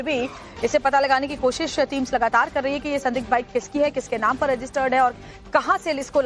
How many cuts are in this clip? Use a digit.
1